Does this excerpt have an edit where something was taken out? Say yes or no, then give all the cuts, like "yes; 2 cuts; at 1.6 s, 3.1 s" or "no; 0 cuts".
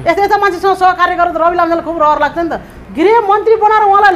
yes; 1 cut; at 2.7 s